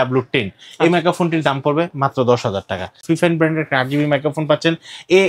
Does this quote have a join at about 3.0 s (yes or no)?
yes